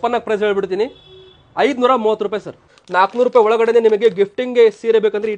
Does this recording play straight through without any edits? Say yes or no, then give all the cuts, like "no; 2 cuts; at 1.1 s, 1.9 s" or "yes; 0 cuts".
no; 1 cut; at 2.8 s